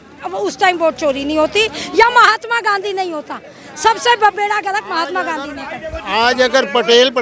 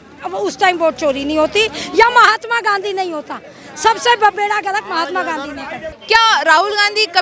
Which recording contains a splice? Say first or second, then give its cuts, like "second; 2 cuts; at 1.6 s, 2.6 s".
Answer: second; 1 cut; at 5.9 s